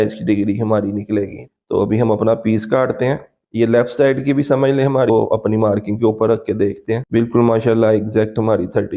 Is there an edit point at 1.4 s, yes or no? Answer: yes